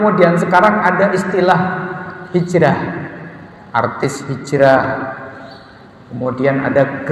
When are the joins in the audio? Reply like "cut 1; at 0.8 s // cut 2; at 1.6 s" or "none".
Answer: none